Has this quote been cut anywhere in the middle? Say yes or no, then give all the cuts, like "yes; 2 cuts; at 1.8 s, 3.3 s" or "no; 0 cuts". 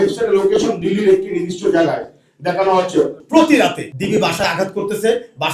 yes; 2 cuts; at 3.2 s, 3.9 s